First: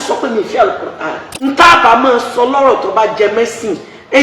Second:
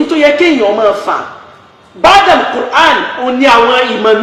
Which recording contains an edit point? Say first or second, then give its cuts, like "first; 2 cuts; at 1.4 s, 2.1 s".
first; 1 cut; at 1.3 s